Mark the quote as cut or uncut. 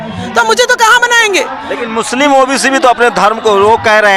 uncut